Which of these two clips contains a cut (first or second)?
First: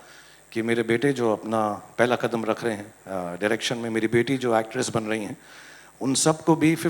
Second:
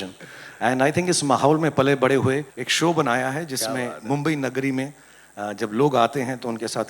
second